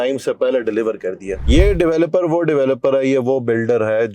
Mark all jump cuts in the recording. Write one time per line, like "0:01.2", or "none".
0:01.4